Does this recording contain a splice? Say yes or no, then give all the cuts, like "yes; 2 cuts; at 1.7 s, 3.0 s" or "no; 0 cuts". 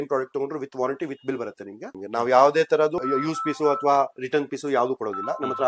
yes; 2 cuts; at 1.9 s, 2.9 s